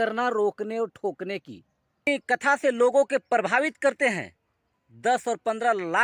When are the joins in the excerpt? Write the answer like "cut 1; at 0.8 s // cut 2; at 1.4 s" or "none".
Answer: cut 1; at 2.1 s

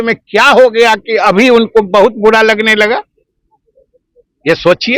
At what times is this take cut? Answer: none

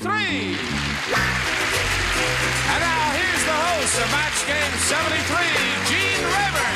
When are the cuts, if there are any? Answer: none

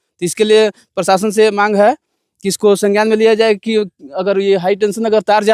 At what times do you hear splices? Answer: none

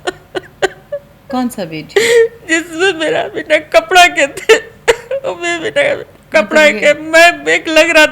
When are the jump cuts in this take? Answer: cut 1; at 1.1 s

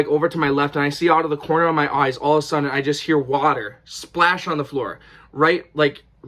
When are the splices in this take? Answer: none

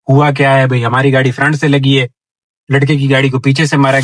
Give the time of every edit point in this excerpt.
none

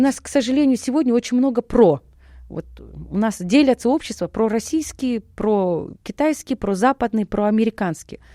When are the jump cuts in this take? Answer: none

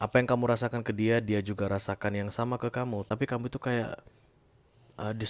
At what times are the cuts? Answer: cut 1; at 3.0 s

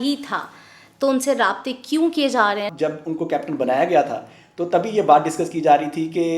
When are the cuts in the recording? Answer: cut 1; at 2.7 s

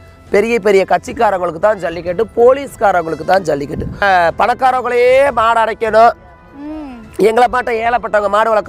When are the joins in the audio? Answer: cut 1; at 4.0 s

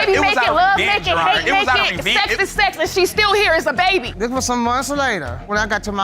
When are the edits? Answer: cut 1; at 4.1 s

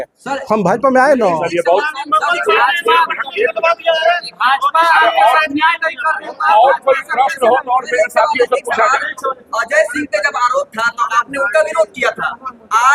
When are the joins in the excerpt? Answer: none

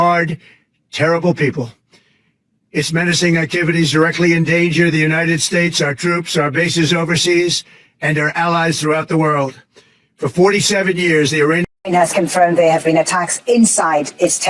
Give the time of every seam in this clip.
cut 1; at 11.6 s

